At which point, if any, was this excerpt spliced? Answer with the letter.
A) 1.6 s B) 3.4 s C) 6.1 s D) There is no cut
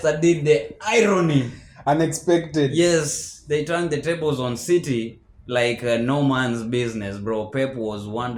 D